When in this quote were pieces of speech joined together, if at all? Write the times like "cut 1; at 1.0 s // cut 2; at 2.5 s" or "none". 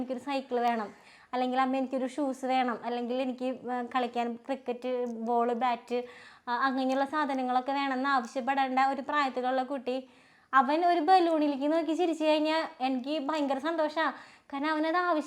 none

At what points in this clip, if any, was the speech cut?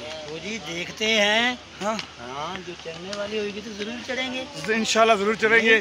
none

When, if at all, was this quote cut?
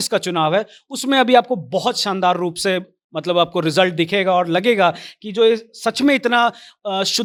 none

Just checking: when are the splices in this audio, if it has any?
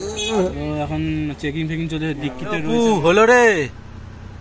cut 1; at 2.6 s

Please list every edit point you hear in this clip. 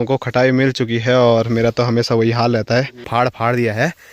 cut 1; at 3.1 s

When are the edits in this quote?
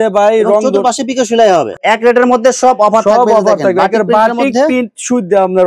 cut 1; at 1.7 s

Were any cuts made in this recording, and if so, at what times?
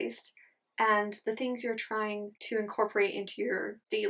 cut 1; at 2.3 s

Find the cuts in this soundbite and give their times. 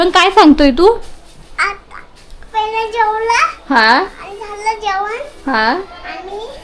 none

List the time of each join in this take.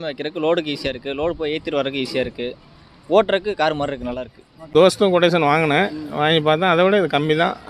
cut 1; at 4.7 s

